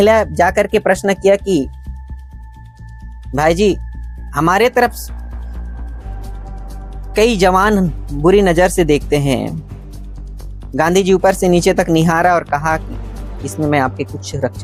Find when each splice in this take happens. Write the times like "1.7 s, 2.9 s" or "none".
none